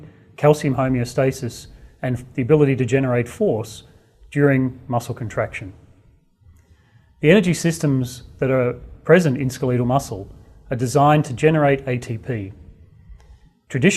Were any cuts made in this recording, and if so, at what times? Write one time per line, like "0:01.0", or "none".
0:11.8